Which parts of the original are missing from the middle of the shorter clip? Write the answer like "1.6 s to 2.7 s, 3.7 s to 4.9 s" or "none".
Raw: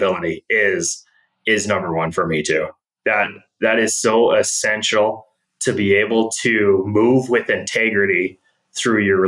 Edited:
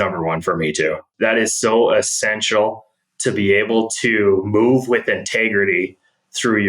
2.8 s to 3.5 s